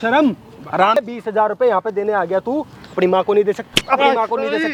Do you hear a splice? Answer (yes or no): no